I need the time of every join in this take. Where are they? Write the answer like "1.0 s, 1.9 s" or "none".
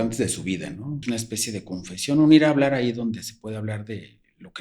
1.0 s